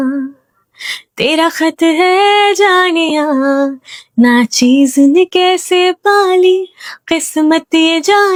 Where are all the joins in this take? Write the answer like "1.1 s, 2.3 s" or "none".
none